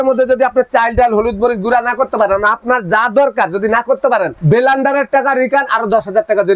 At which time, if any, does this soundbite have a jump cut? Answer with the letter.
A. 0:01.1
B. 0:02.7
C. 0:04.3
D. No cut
C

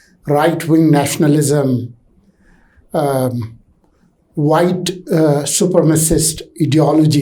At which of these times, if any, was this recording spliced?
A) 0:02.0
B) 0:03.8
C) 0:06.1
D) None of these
D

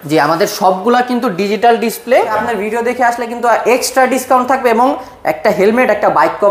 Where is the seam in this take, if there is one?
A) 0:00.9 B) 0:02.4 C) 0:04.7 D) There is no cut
B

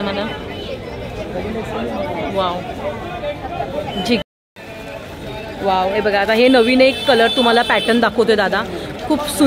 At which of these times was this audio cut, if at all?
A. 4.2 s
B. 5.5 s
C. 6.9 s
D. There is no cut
A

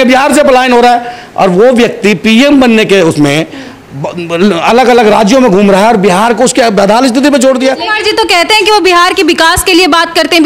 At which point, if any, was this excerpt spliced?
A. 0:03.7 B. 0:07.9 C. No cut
B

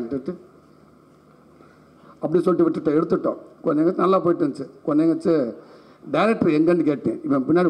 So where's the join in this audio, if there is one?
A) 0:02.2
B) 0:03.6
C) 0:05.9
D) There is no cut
D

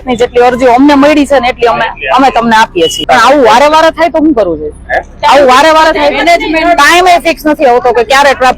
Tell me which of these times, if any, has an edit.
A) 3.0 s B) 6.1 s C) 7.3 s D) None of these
A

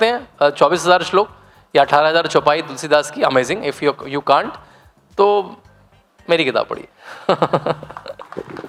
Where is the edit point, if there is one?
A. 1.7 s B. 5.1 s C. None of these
C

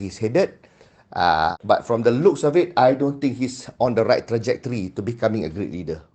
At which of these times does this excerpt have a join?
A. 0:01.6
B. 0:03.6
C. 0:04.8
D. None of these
A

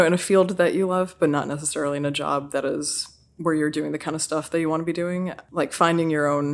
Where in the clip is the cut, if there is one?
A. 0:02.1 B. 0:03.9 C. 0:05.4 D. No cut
C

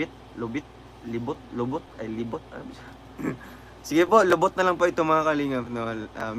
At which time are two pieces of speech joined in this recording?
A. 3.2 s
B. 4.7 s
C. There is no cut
A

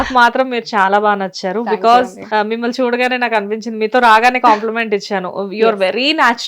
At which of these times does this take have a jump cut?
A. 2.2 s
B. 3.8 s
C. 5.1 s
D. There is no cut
A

